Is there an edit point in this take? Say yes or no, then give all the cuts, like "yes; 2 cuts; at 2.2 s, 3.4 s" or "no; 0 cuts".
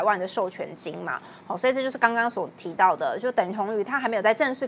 no; 0 cuts